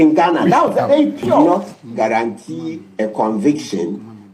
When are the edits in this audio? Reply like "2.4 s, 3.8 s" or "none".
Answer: 1.4 s